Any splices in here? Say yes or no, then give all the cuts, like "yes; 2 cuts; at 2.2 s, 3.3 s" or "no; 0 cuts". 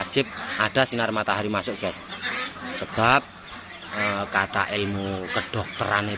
no; 0 cuts